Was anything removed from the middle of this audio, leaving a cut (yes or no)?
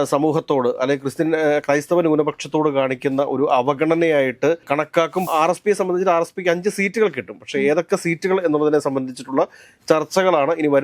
yes